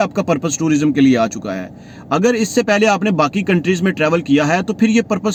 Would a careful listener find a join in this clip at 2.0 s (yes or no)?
no